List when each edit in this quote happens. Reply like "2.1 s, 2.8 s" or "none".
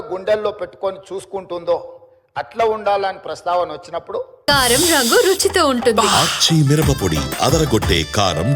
4.3 s